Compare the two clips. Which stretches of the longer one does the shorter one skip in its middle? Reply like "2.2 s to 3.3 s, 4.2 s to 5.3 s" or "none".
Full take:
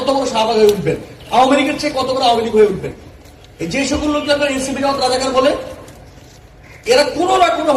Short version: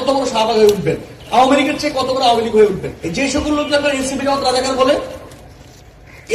3.0 s to 3.5 s